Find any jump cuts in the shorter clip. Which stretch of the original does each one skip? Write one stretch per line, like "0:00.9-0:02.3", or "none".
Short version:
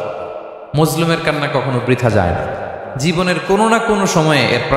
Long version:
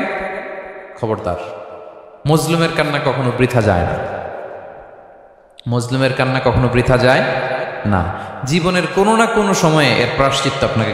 0:04.4-0:08.3